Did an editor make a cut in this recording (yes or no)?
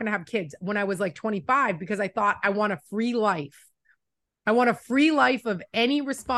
no